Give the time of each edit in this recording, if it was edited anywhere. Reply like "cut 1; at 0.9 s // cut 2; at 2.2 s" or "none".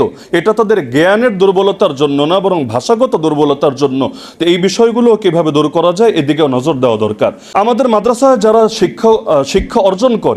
cut 1; at 7.4 s